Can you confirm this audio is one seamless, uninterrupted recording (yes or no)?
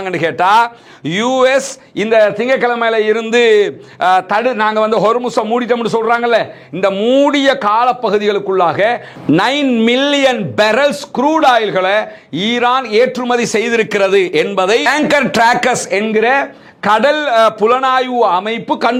yes